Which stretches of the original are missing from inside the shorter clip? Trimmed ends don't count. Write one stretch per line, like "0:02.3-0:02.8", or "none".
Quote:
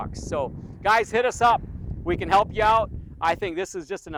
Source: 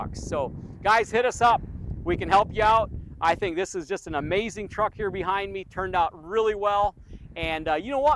none